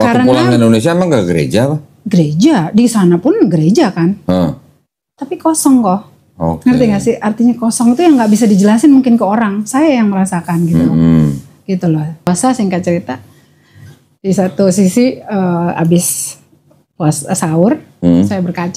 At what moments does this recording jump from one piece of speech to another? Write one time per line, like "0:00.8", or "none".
0:12.3